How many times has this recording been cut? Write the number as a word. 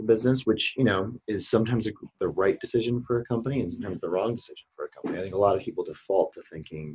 zero